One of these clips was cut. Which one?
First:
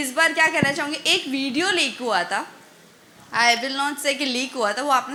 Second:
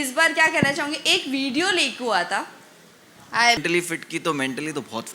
second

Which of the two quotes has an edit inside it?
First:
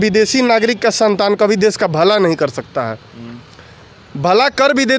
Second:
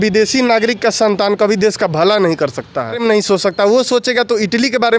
second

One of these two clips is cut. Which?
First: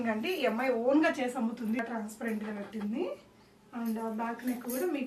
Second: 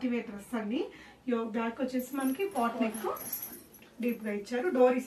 first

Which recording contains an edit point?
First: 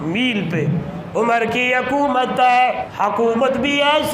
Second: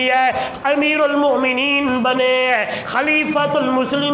first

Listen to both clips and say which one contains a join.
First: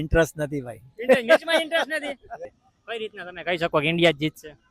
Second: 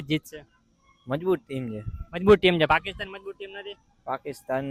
first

